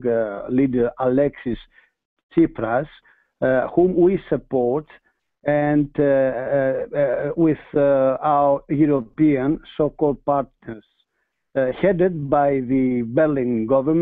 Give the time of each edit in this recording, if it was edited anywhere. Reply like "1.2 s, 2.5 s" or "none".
4.0 s